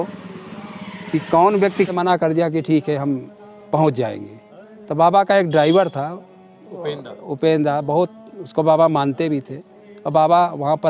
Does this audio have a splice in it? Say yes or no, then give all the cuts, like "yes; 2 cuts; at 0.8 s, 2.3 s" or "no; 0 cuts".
yes; 1 cut; at 1.9 s